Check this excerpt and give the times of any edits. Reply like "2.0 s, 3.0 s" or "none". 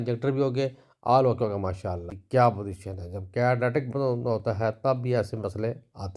2.1 s